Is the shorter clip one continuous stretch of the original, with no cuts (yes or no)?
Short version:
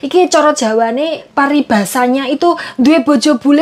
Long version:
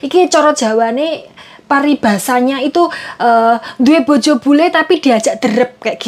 no